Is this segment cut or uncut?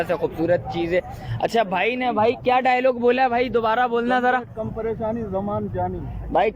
uncut